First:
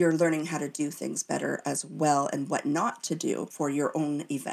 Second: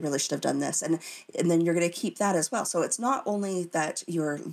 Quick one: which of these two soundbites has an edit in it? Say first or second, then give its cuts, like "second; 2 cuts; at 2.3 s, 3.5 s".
first; 1 cut; at 3.5 s